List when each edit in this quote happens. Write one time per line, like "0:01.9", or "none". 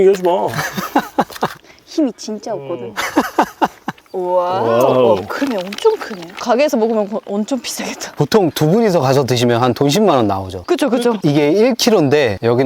0:01.6
0:03.9
0:06.4
0:11.2